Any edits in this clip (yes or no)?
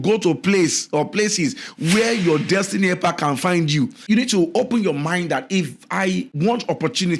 yes